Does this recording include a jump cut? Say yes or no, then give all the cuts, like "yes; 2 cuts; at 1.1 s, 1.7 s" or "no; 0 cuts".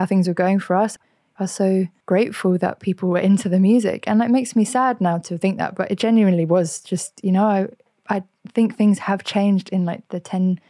yes; 2 cuts; at 0.9 s, 2.0 s